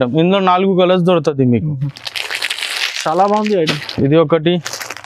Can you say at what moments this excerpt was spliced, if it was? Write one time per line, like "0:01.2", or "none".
none